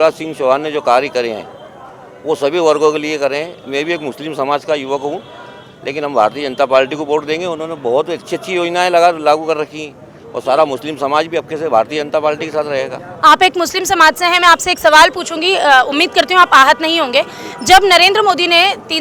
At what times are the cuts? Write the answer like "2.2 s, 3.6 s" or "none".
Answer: none